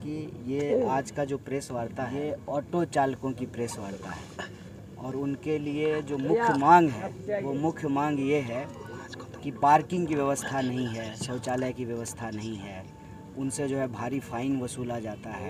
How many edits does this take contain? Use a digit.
1